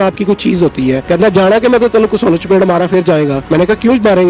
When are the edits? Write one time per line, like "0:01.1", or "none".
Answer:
0:01.0
0:03.4